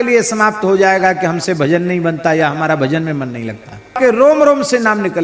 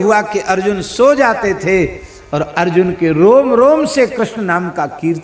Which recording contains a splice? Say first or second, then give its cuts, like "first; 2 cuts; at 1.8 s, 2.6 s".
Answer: first; 1 cut; at 3.9 s